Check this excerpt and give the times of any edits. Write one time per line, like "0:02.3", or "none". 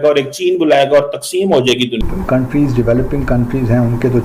0:02.0